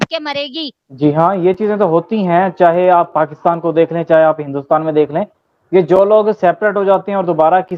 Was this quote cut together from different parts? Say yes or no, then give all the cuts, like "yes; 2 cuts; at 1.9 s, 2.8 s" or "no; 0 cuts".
no; 0 cuts